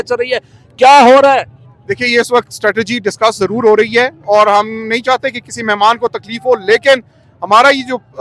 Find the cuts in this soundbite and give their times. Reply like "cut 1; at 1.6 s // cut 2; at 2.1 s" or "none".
none